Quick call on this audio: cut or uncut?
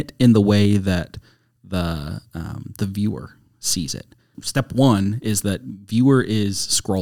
uncut